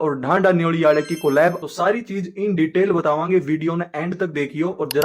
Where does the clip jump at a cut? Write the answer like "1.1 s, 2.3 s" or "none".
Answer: 1.6 s